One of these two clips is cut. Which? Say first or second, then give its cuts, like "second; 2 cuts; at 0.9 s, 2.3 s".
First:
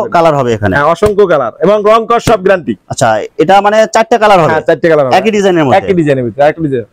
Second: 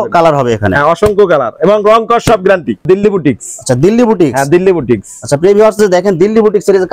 second; 1 cut; at 2.8 s